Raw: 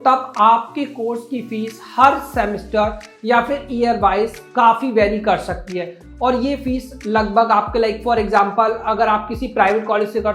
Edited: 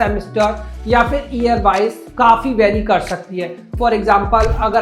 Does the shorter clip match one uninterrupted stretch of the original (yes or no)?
no